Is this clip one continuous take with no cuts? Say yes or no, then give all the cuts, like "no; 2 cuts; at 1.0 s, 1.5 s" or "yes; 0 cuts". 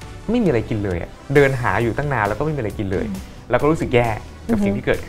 yes; 0 cuts